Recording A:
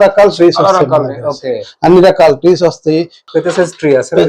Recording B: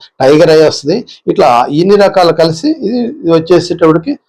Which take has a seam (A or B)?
A